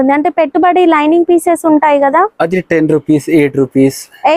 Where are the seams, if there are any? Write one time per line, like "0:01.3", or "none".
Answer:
none